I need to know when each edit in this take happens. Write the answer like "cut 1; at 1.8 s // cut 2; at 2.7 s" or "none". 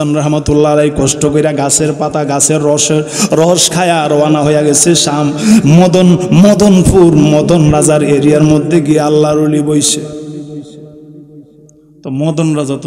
none